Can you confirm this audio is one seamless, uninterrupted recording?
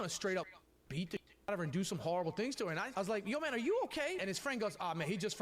no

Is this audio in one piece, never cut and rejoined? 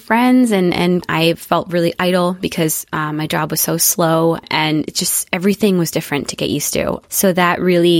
no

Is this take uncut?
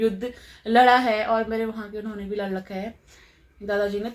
yes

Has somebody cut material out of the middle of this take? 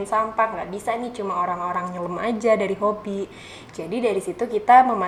no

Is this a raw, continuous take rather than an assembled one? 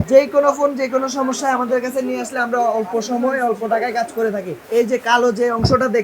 no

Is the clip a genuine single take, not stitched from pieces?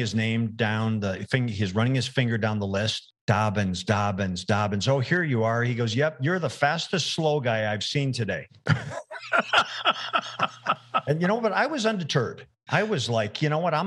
no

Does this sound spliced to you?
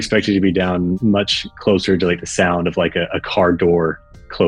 yes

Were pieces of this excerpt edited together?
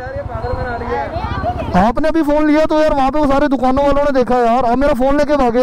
no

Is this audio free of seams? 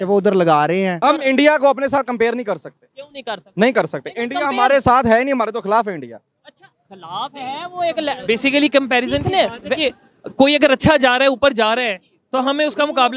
no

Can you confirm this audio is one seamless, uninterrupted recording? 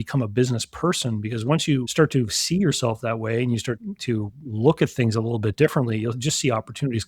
yes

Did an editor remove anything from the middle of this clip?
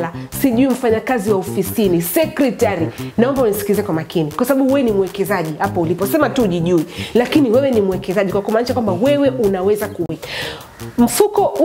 yes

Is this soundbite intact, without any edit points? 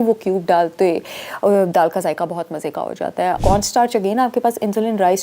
no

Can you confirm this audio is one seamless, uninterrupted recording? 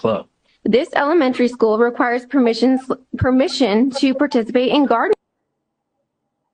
yes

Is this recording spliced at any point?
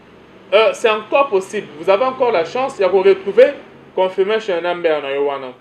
no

